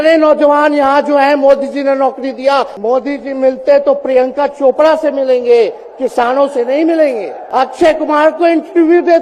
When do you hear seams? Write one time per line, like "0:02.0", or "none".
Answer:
0:02.7
0:07.4